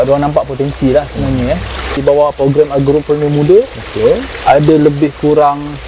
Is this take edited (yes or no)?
yes